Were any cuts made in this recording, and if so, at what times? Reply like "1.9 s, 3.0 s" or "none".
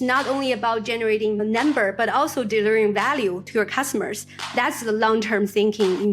1.4 s